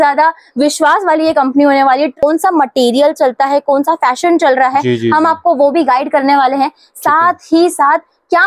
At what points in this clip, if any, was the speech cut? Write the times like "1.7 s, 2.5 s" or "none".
2.2 s